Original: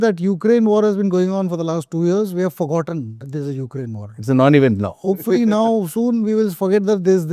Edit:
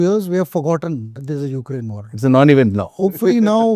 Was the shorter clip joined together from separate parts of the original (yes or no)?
no